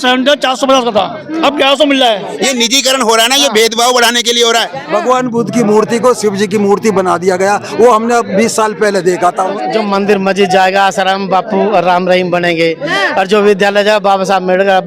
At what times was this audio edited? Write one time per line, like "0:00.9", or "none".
0:02.3
0:04.8
0:09.6